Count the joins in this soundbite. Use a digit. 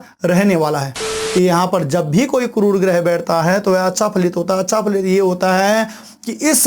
1